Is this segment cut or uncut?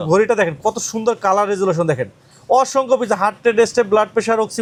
uncut